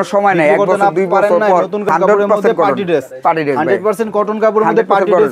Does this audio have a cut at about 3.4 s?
no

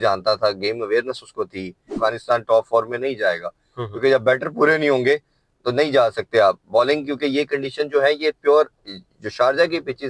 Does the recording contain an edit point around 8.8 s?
no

